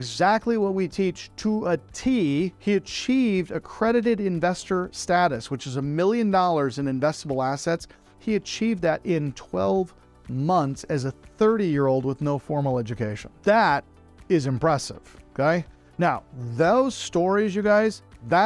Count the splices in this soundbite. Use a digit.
2